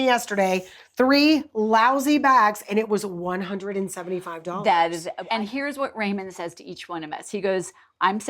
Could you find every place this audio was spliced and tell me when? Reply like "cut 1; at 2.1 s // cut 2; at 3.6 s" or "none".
cut 1; at 5.1 s